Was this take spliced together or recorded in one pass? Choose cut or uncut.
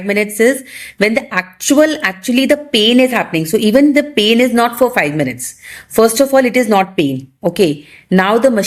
uncut